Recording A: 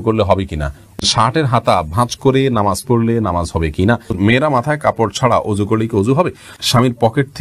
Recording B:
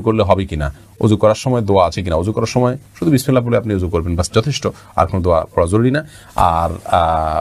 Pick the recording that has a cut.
A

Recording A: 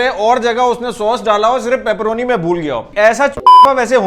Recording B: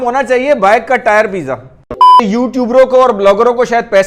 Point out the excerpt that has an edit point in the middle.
B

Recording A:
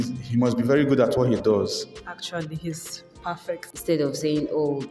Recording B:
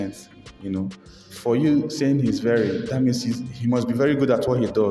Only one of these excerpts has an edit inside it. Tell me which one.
A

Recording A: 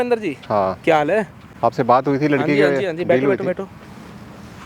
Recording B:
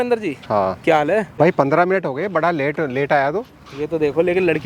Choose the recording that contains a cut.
B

